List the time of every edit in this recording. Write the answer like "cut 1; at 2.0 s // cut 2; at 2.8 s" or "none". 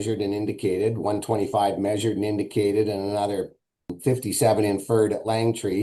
cut 1; at 3.9 s